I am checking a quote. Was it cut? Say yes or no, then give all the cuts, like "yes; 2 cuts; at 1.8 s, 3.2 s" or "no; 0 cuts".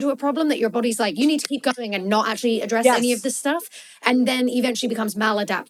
no; 0 cuts